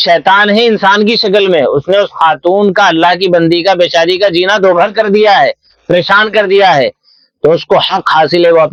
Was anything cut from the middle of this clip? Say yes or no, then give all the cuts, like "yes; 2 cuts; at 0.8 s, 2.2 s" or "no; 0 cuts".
no; 0 cuts